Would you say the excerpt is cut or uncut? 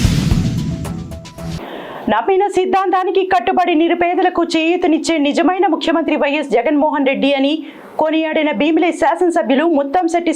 cut